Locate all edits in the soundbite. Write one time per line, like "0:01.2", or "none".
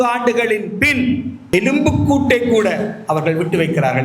0:01.4